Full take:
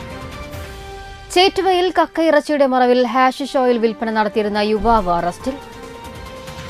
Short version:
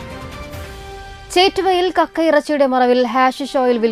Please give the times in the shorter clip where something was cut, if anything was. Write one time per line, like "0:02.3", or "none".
none